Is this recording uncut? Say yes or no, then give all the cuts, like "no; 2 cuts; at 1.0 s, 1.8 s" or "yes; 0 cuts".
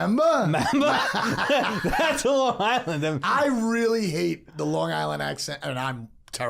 yes; 0 cuts